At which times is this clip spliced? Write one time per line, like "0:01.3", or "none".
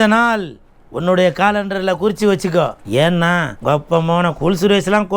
0:02.8
0:03.5